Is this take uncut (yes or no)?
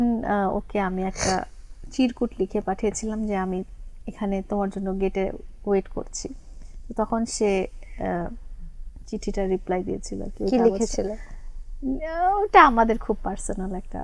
yes